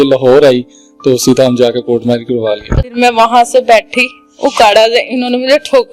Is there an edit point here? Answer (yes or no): yes